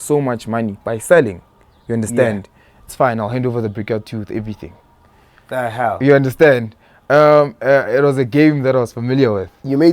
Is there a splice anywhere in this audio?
no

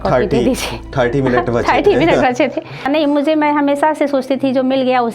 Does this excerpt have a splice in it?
yes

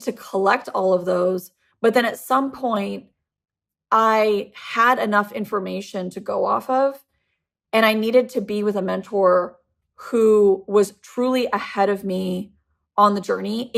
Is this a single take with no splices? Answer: yes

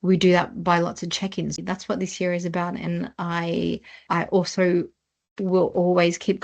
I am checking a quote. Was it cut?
yes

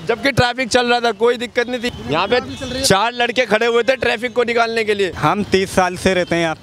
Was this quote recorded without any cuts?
no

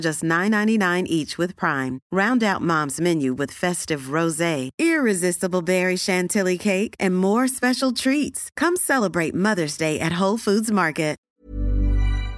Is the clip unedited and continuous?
no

